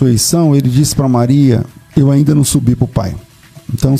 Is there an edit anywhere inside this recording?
yes; 1 cut; at 1.8 s

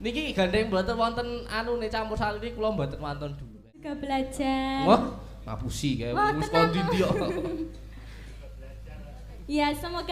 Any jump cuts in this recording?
yes; 1 cut; at 3.9 s

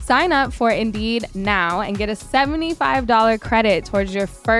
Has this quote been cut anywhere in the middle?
no; 0 cuts

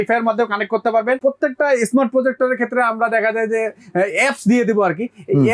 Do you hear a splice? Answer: yes; 1 cut; at 1.2 s

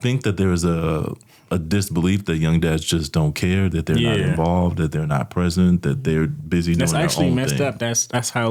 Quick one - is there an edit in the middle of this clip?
no; 0 cuts

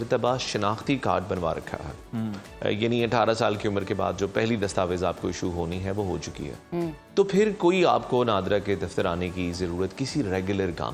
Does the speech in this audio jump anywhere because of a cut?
no; 0 cuts

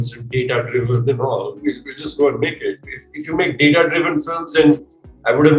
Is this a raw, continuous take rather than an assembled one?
yes; 0 cuts

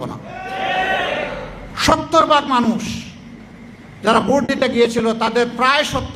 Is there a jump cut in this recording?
yes; 1 cut; at 1.6 s

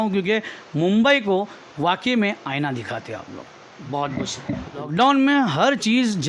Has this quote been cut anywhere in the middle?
yes; 1 cut; at 4.9 s

